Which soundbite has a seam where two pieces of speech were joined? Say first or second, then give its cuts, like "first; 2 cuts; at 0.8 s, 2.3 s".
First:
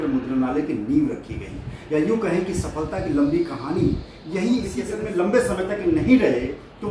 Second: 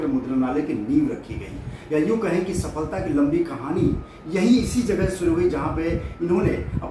first; 1 cut; at 4.9 s